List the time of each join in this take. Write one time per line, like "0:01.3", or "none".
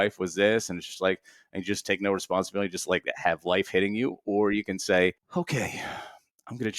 0:05.2